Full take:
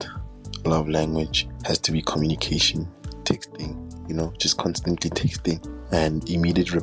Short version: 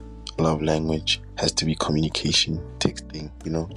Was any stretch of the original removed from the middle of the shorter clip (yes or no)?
yes